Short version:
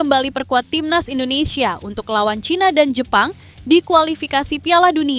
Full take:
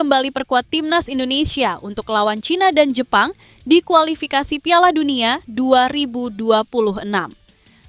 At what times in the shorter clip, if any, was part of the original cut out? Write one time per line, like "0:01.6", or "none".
none